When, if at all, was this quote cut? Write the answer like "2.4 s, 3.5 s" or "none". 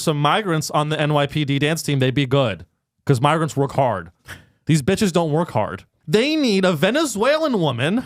5.9 s